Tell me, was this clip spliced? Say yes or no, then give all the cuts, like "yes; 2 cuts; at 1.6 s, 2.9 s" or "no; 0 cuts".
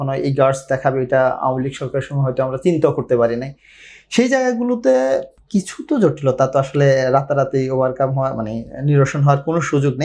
no; 0 cuts